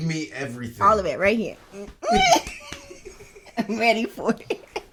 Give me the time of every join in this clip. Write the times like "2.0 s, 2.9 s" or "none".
none